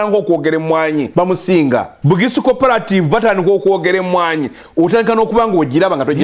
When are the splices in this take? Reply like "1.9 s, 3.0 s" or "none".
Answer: 1.1 s, 1.9 s